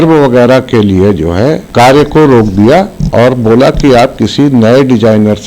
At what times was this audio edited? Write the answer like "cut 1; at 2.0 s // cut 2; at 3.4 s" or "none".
cut 1; at 1.6 s